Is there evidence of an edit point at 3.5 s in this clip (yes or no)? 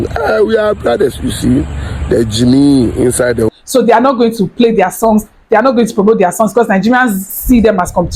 yes